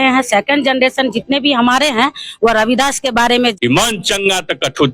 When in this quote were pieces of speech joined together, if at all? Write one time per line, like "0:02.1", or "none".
0:03.4

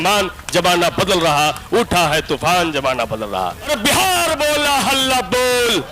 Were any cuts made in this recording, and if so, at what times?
0:03.7

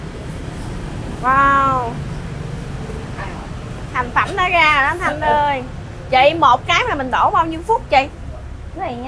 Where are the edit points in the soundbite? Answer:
none

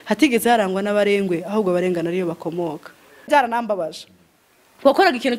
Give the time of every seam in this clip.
0:03.3

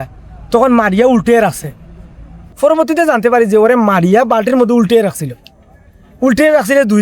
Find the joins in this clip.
0:02.4

